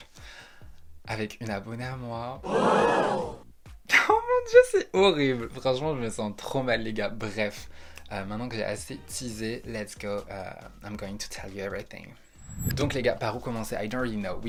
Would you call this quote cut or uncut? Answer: uncut